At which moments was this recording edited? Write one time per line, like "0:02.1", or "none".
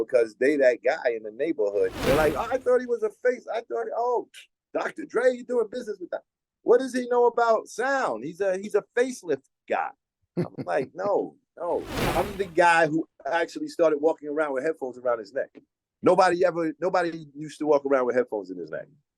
0:02.0
0:12.0